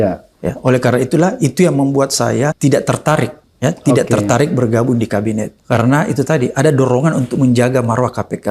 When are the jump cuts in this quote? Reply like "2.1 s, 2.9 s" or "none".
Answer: 2.6 s, 3.4 s, 5.5 s